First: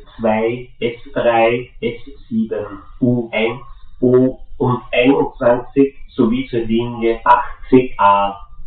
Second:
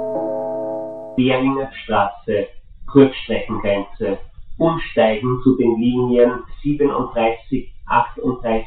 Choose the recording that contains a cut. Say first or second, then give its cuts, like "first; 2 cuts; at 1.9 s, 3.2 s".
second; 1 cut; at 1.0 s